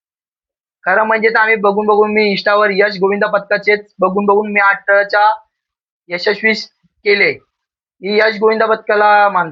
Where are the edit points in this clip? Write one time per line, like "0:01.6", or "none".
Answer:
none